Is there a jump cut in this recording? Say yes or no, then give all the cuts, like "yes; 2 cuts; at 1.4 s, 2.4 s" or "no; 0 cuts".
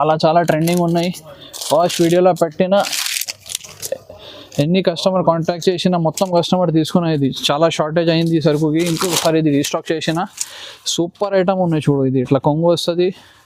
no; 0 cuts